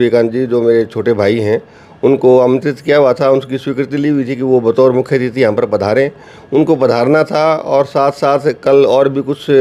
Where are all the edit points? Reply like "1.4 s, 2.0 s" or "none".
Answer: none

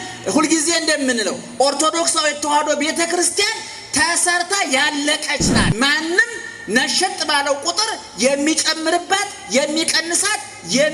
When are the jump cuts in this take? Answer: 5.7 s

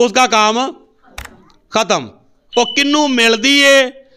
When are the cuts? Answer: none

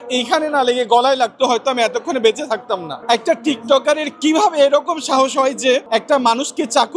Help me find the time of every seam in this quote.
2.9 s, 5.8 s

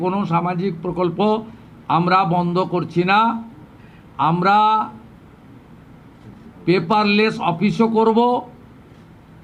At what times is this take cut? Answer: none

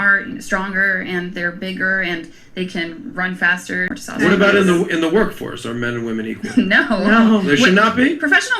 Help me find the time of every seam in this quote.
3.9 s

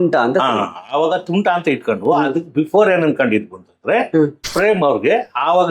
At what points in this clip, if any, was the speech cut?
4.5 s

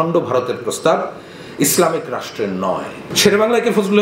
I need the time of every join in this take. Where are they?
3.0 s

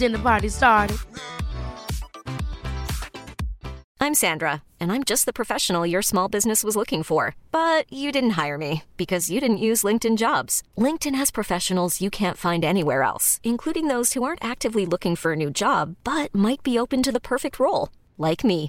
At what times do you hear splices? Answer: none

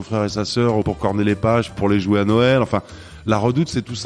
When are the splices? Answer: 0.8 s, 1.8 s

